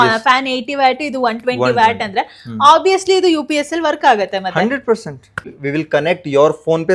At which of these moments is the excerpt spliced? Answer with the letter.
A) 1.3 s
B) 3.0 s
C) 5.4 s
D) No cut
C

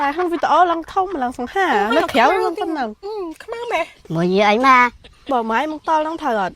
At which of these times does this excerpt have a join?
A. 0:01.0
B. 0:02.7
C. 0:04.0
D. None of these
C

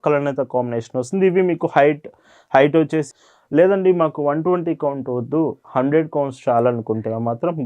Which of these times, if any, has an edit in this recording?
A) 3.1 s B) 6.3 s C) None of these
A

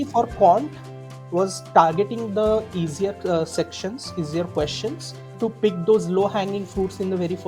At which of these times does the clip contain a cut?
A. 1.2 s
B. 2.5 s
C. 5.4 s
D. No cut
C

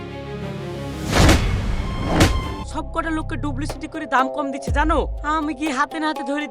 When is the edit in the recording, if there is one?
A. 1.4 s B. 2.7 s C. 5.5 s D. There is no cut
B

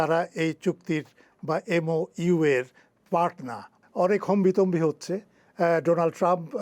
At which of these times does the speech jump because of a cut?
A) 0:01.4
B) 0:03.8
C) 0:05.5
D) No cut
B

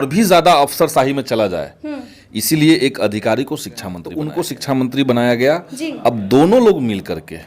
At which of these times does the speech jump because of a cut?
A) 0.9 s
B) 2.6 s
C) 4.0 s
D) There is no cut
C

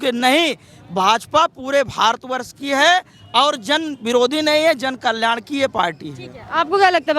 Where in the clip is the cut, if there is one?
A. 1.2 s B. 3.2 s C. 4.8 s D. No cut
D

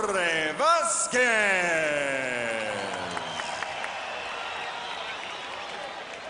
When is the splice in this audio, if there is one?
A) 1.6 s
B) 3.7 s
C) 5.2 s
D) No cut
B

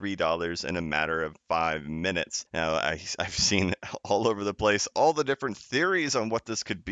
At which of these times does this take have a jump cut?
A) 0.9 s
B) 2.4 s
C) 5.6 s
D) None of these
B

